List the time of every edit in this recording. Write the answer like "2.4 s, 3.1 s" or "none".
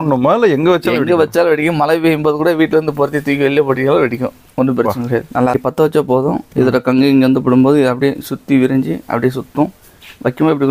5.5 s